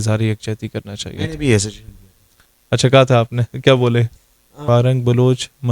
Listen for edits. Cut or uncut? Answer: cut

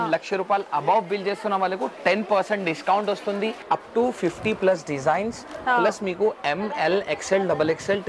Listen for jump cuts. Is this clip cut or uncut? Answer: cut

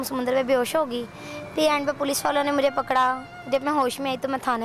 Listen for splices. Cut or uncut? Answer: uncut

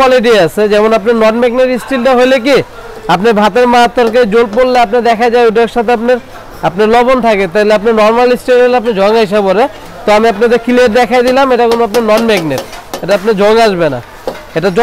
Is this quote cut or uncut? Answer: uncut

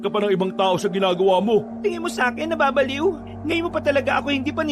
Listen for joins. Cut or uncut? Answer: cut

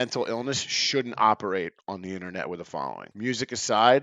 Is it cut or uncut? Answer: cut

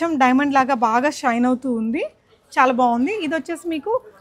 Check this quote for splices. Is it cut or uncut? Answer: uncut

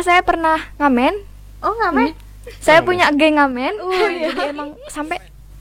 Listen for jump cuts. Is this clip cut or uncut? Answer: cut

